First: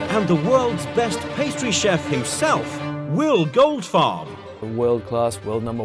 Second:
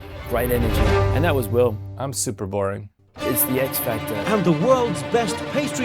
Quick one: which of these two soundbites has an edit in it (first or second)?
second